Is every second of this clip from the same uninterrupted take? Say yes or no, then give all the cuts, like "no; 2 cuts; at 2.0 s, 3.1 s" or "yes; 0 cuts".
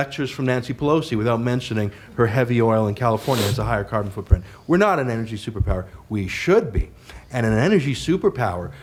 yes; 0 cuts